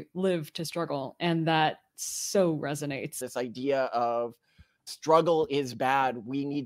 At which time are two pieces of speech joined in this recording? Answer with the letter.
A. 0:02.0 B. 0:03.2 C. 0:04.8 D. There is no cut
B